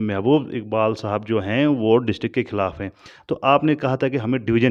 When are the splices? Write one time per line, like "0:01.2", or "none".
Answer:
none